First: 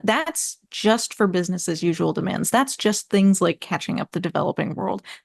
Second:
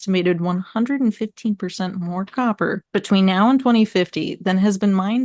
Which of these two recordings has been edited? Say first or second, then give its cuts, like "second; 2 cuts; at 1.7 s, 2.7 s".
second; 1 cut; at 2.8 s